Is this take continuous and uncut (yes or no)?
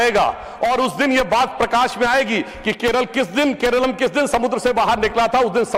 yes